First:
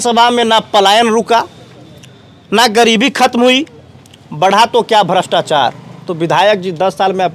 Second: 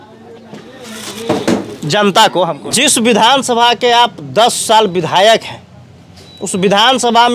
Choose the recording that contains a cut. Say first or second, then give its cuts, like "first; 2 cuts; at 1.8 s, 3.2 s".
second; 1 cut; at 2.7 s